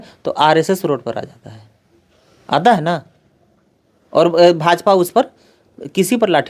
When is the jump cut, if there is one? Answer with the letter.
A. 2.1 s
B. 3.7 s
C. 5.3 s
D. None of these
D